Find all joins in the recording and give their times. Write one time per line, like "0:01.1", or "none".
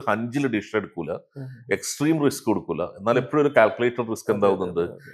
none